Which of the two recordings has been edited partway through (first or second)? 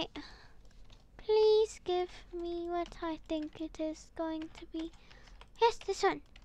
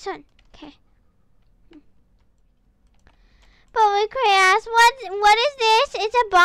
second